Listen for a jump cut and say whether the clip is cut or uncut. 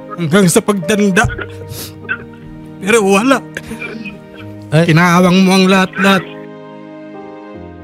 cut